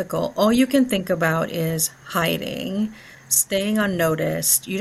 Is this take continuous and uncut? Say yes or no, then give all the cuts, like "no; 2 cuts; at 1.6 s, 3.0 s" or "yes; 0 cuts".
yes; 0 cuts